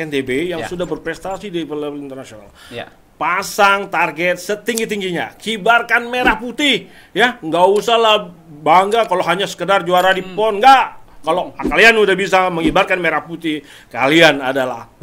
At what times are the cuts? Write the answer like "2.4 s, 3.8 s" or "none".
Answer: none